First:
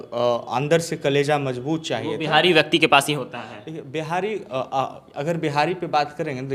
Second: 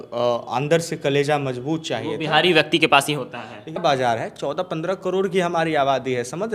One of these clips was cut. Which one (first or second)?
second